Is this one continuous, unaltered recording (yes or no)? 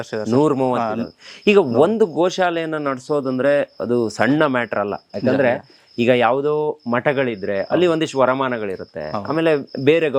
yes